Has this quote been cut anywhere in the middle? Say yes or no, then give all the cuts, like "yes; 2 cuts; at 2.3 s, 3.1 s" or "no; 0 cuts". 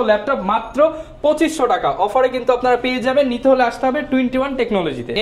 no; 0 cuts